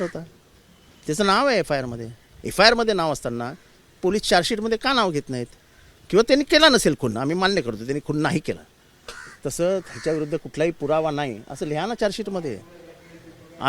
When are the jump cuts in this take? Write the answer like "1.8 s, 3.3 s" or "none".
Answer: none